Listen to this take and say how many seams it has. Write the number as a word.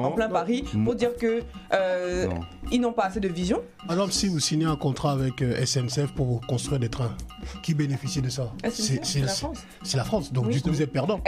one